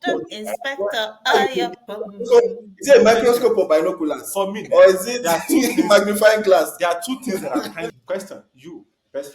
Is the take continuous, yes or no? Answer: no